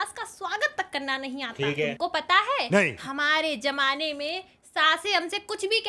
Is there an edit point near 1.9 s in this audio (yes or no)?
yes